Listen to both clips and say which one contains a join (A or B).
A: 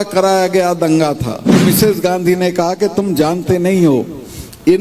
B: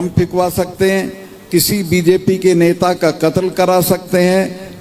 A